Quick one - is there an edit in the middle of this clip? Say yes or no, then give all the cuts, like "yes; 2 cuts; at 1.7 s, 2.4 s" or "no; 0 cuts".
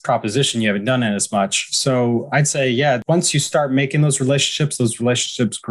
yes; 1 cut; at 3.0 s